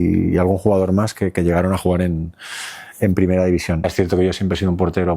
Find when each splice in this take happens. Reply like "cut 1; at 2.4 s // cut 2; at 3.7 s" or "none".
cut 1; at 3.9 s